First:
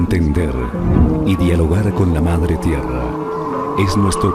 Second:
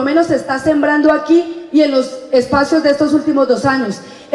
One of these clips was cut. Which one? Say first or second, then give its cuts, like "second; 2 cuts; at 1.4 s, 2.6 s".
second; 1 cut; at 2.2 s